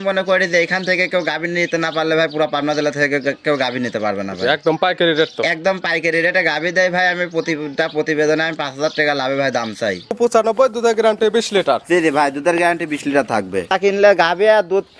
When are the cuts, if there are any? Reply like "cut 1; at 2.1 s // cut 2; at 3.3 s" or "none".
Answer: cut 1; at 10.2 s // cut 2; at 13.7 s